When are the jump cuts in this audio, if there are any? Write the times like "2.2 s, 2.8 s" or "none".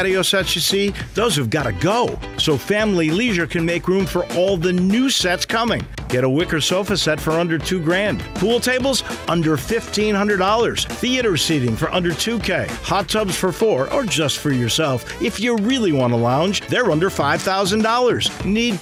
none